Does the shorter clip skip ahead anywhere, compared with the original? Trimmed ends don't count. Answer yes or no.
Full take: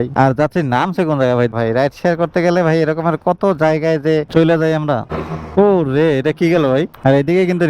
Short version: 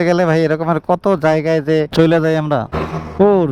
no